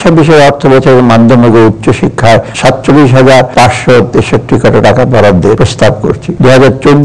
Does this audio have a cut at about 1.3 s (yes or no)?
no